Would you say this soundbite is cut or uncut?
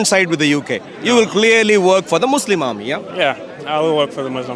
uncut